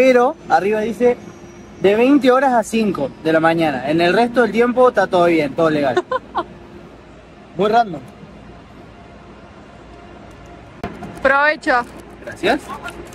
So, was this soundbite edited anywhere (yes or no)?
no